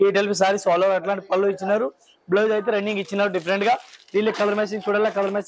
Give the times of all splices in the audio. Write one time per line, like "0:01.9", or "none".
none